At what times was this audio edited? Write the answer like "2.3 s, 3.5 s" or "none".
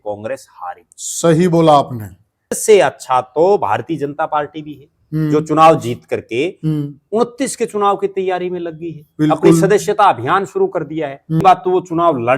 2.5 s, 11.4 s